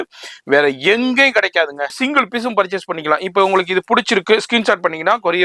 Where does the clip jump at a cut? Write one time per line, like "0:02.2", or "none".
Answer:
0:01.9